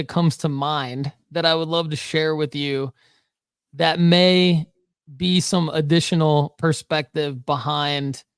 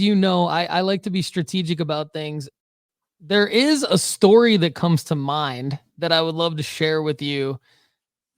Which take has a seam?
second; 1 cut; at 2.6 s

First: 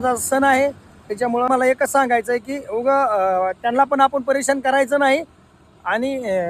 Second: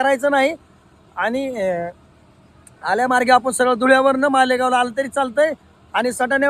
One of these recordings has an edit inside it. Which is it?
first; 1 cut; at 1.5 s

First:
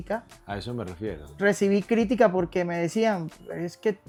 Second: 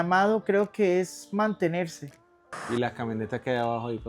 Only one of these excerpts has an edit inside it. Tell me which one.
second; 1 cut; at 2.6 s

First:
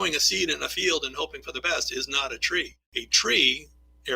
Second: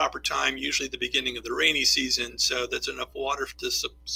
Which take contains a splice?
first; 1 cut; at 2.5 s

